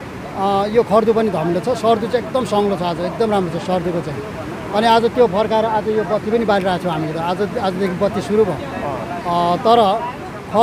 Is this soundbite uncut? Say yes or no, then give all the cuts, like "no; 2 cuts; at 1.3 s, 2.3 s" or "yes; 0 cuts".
yes; 0 cuts